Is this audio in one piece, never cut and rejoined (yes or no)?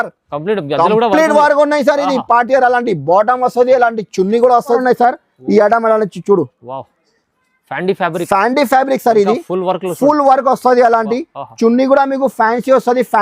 no